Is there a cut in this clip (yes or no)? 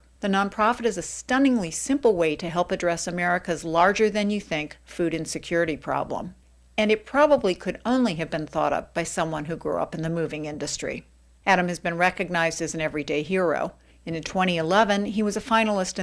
no